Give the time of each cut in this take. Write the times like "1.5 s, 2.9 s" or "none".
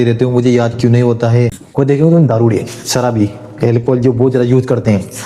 1.6 s